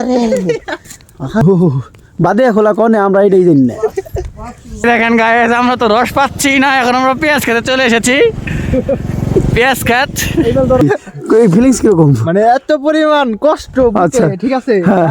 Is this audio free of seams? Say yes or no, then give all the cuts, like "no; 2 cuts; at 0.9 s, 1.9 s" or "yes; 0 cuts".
no; 3 cuts; at 1.4 s, 4.8 s, 10.8 s